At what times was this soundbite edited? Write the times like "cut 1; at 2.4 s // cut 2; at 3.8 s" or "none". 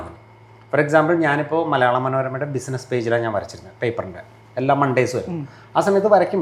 none